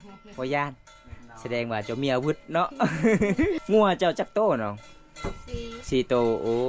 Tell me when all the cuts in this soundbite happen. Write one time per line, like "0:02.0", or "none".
0:03.6